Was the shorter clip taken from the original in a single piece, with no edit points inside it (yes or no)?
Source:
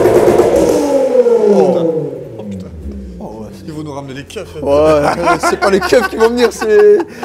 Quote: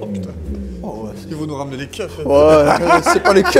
yes